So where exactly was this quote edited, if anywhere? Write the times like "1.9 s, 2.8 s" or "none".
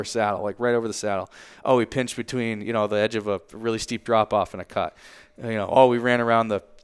none